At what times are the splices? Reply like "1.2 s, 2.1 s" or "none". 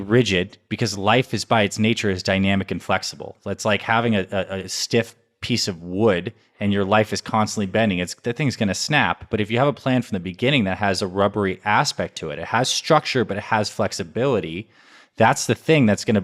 none